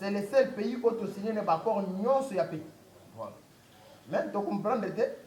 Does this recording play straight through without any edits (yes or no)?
yes